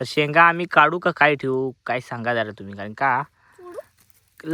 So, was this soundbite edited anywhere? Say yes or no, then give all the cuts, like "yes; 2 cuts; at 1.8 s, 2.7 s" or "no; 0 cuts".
no; 0 cuts